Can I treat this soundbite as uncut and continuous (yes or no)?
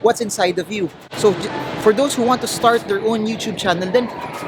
yes